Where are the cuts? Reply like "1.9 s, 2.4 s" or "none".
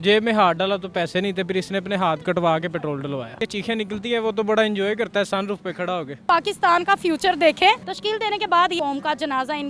3.4 s, 6.2 s, 8.8 s